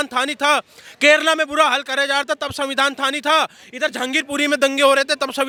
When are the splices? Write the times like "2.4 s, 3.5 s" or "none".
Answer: none